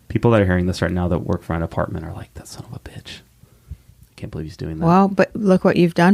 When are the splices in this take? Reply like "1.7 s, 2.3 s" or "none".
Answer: none